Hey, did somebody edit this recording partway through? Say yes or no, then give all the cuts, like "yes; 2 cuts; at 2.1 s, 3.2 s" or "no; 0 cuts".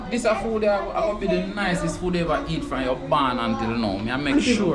no; 0 cuts